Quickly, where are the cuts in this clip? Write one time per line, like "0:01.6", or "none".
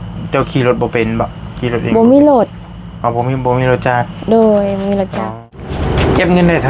0:05.6